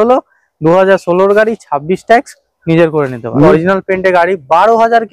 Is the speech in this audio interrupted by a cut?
yes; 1 cut; at 3.5 s

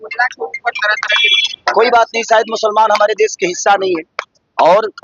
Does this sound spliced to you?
no; 0 cuts

